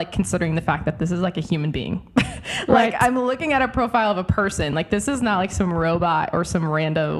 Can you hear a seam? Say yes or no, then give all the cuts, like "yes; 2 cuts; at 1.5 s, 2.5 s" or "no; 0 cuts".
no; 0 cuts